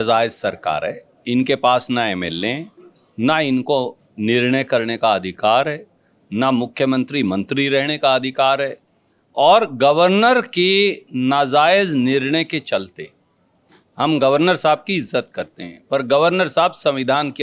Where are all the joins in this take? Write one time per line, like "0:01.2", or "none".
none